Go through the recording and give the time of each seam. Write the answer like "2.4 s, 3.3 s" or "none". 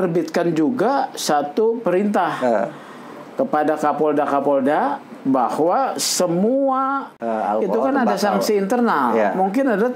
7.2 s